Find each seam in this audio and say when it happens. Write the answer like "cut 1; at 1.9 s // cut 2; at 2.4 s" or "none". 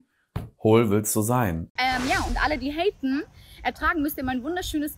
cut 1; at 1.7 s